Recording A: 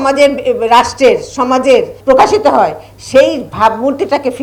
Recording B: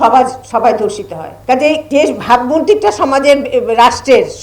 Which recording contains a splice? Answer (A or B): B